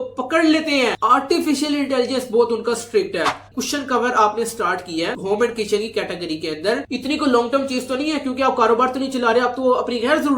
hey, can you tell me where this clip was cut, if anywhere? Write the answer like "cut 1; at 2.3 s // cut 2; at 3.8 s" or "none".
cut 1; at 3.5 s // cut 2; at 6.9 s